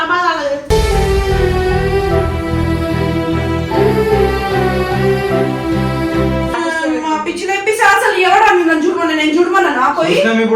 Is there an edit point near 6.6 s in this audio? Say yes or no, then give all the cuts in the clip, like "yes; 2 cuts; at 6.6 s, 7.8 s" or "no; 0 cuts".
yes; 1 cut; at 6.6 s